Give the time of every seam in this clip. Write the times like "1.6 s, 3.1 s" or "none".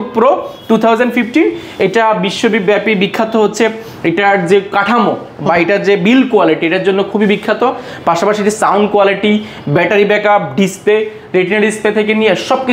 none